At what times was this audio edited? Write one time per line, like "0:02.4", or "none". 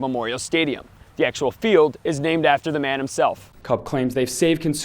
0:03.5